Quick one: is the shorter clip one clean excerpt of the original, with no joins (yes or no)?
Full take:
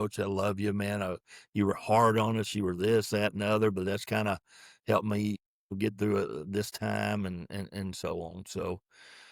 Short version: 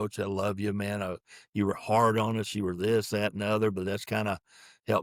yes